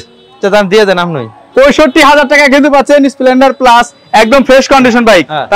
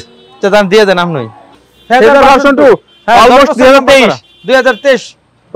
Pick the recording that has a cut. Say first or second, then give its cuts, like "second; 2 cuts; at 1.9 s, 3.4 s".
second; 1 cut; at 1.4 s